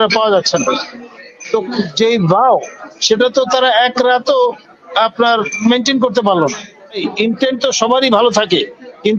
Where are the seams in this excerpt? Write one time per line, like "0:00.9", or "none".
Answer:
0:07.1